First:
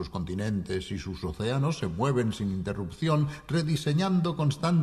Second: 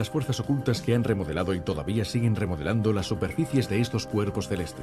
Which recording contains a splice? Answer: first; 1 cut; at 3.4 s

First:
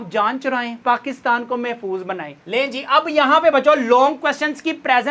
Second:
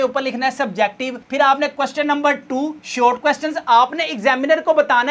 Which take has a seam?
first; 1 cut; at 2.4 s

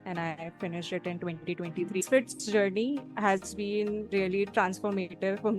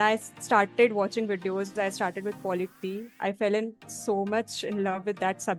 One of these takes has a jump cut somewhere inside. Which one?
first; 1 cut; at 2.1 s

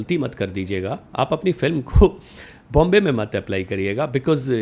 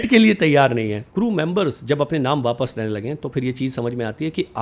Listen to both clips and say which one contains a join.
second; 1 cut; at 1.0 s

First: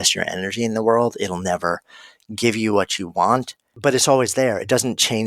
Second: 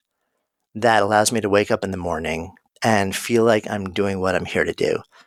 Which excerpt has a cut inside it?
first; 1 cut; at 3.6 s

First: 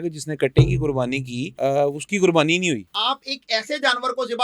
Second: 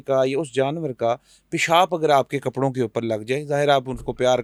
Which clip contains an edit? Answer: first; 2 cuts; at 1.4 s, 2.9 s

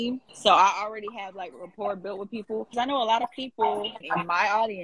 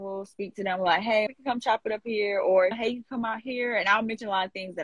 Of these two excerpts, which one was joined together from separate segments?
first; 2 cuts; at 2.7 s, 4.0 s

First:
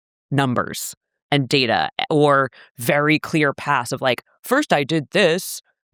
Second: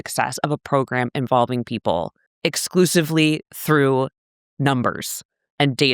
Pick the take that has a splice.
second; 1 cut; at 2.2 s

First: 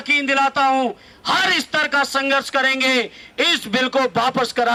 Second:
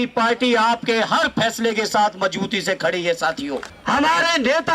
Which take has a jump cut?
second; 1 cut; at 3.7 s

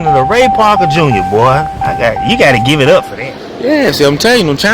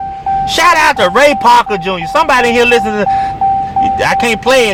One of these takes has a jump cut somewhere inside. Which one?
first; 1 cut; at 3.1 s

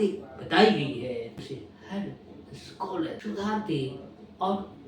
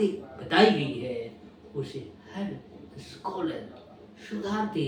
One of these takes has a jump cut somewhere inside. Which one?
first; 2 cuts; at 1.4 s, 3.2 s

